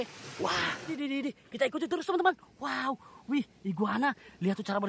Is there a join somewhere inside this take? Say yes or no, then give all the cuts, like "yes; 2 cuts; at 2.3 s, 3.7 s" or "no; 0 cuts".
yes; 1 cut; at 0.9 s